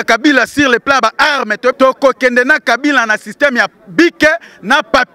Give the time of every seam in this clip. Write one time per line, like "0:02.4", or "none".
0:01.8